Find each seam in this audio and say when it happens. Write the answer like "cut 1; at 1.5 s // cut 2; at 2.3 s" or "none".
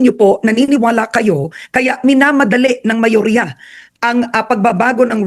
none